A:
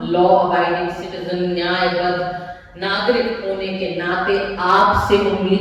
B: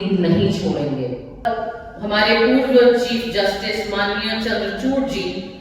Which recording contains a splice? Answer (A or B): B